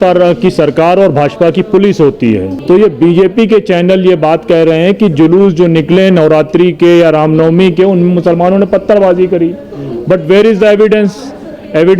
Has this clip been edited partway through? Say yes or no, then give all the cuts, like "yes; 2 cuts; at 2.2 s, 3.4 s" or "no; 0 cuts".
yes; 1 cut; at 2.5 s